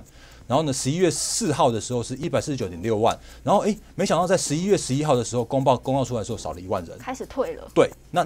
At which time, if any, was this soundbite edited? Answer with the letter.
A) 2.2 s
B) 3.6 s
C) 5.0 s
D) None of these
A